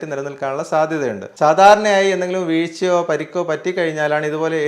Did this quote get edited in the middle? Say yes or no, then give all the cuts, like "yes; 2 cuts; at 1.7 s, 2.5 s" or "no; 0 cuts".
yes; 1 cut; at 1.2 s